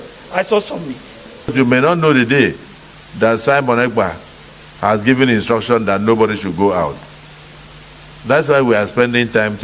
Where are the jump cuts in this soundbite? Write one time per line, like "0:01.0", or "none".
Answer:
0:01.5